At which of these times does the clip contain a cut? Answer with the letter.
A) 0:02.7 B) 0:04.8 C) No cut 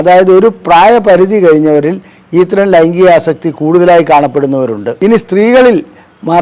B